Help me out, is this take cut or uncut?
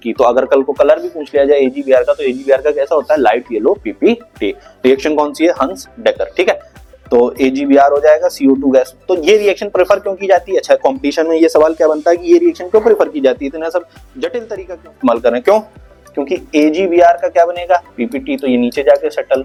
uncut